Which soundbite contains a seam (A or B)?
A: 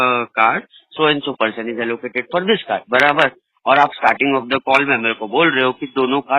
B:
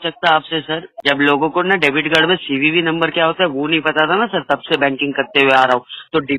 B